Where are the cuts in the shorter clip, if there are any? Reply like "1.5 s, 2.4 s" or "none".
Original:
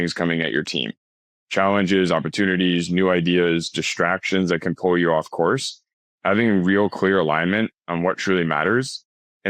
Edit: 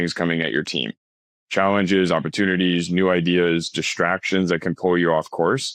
none